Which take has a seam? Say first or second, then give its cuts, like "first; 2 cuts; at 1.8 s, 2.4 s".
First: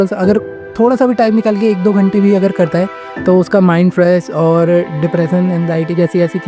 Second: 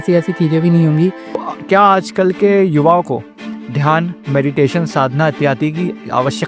second; 1 cut; at 1.5 s